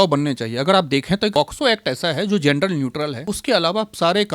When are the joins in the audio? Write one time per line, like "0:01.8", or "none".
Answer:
0:01.3
0:03.2